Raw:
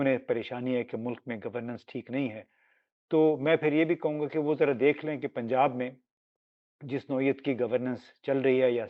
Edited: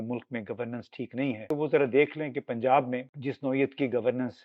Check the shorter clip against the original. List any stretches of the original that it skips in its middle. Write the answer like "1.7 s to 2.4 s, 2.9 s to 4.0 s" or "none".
2.4 s to 4.3 s, 6.0 s to 6.8 s

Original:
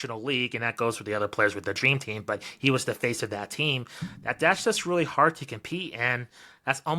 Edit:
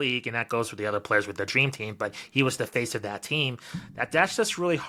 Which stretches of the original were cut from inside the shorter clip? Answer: none

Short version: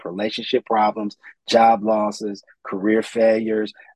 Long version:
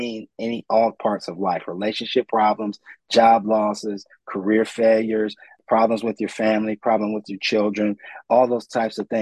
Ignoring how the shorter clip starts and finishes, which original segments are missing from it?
none

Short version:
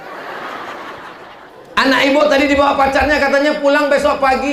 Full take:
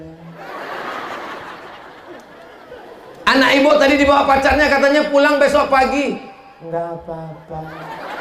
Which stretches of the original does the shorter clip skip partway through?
1.9 s to 3.0 s

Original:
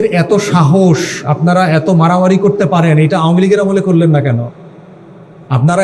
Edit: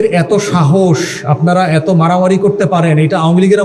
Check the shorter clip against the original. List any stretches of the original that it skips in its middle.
none

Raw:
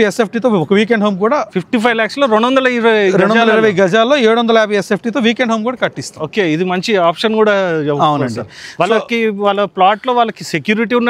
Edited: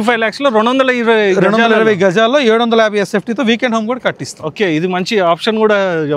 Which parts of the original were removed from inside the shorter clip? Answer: none

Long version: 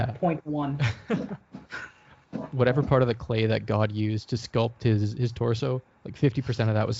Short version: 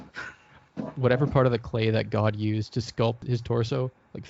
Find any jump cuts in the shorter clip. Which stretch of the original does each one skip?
4.8 s to 5.1 s

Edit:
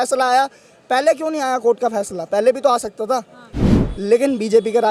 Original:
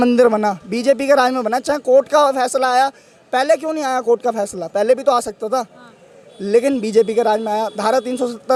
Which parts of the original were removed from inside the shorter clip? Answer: none

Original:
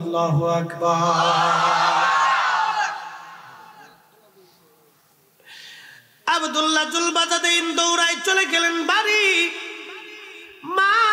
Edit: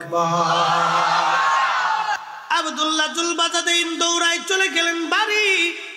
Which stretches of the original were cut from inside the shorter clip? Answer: 3.0 s to 6.0 s

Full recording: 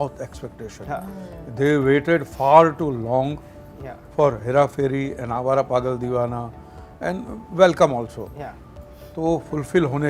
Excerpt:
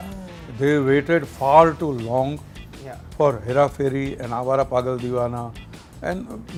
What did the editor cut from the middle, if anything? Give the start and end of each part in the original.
none

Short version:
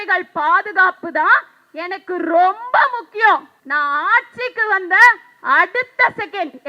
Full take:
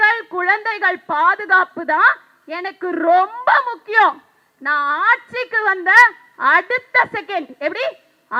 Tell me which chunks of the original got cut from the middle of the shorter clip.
4.3 s to 4.5 s

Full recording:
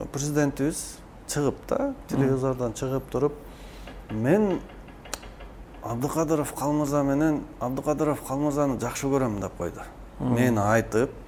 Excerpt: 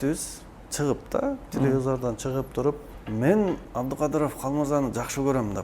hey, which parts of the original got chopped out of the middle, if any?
3.5 s to 4.0 s, 4.7 s to 7.5 s

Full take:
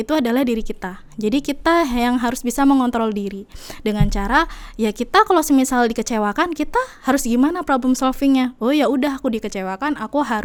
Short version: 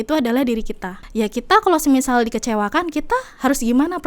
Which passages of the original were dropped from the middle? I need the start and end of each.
1.0 s to 4.6 s

